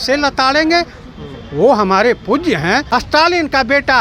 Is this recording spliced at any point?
yes; 1 cut; at 2.8 s

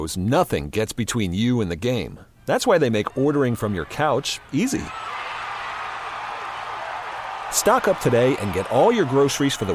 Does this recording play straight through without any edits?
yes; 0 cuts

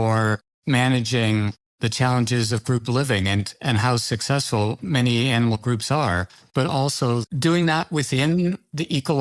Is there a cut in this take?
yes; 2 cuts; at 6.4 s, 7.3 s

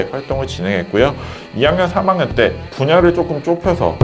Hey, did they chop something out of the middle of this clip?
yes; 1 cut; at 2.7 s

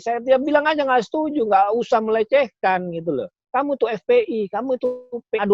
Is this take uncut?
no; 1 cut; at 3.4 s

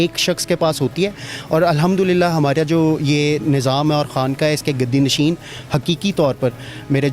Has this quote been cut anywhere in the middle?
no; 0 cuts

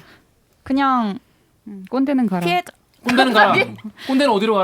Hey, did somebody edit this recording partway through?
no; 0 cuts

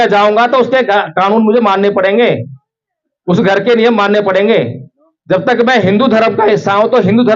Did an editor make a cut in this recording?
no; 0 cuts

